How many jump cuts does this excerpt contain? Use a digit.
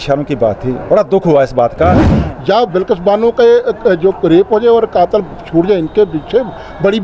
1